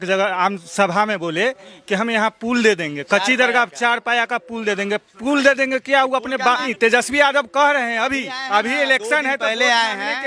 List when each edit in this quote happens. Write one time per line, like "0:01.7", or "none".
none